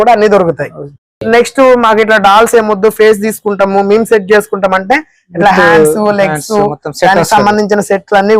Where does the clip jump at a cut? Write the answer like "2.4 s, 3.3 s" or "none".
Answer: 1.1 s